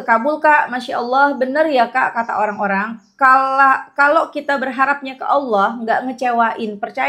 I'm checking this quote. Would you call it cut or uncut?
uncut